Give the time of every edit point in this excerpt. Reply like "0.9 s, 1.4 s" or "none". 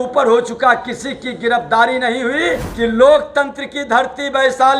2.7 s